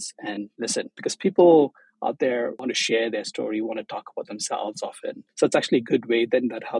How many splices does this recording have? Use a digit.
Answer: 3